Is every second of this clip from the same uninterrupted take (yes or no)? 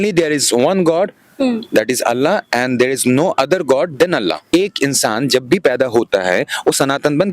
no